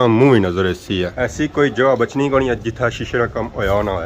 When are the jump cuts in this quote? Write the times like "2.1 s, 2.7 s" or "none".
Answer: 1.1 s